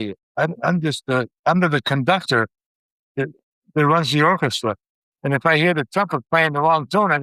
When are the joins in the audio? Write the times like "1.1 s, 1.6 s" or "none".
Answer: none